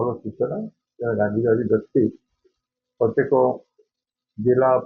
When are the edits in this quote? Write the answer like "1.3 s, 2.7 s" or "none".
none